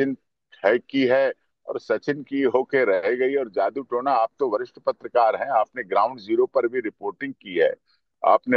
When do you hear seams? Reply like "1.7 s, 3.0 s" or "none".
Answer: none